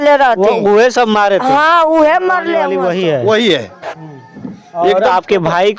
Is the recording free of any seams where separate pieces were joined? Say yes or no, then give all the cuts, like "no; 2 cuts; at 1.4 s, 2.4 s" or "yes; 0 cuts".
no; 1 cut; at 2.7 s